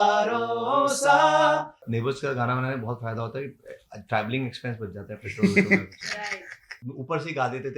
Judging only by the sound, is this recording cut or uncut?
cut